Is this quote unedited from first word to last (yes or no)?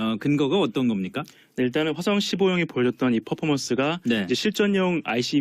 no